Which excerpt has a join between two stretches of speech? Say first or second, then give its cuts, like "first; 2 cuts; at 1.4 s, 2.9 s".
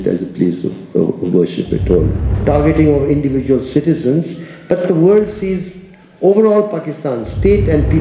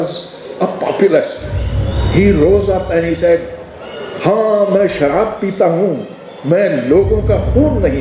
first; 1 cut; at 2.3 s